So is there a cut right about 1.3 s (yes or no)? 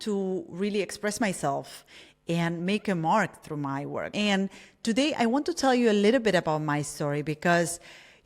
no